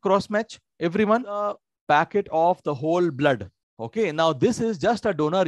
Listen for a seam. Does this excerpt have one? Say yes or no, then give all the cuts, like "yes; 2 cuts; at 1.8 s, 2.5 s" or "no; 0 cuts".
yes; 1 cut; at 1.7 s